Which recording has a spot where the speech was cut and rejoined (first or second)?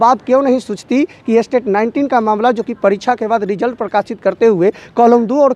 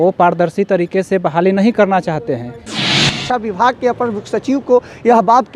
second